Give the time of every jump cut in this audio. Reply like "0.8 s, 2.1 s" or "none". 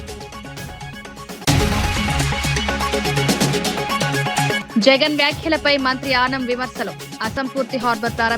1.4 s, 2.8 s, 4.2 s